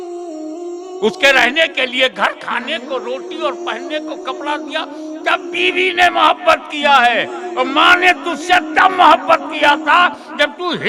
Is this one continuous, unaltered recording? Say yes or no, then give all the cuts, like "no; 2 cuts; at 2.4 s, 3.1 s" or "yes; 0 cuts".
yes; 0 cuts